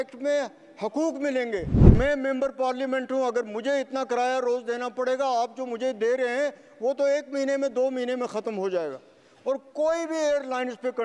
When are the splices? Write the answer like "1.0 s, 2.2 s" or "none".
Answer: 1.9 s